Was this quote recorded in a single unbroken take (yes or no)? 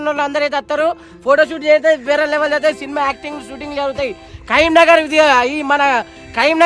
yes